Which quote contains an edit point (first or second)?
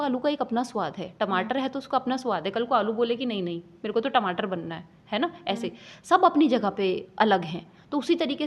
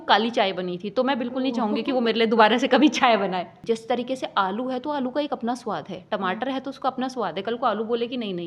second